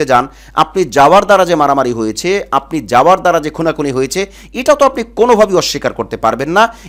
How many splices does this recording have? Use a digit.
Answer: 0